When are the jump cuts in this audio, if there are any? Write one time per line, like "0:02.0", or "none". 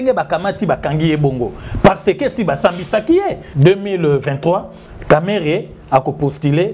0:03.4